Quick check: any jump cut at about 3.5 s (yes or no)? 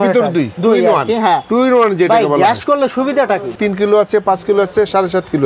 yes